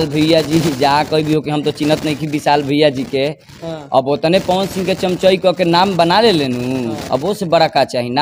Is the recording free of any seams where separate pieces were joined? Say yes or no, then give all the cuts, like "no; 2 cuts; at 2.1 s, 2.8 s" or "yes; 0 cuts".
yes; 0 cuts